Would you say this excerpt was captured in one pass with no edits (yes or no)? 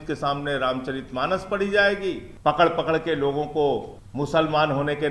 no